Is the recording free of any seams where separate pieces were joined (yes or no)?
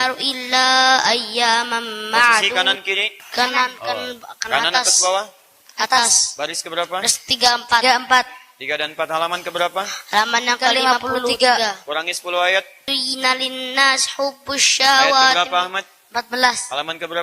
no